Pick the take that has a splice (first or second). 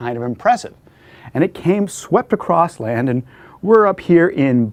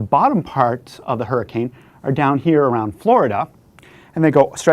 second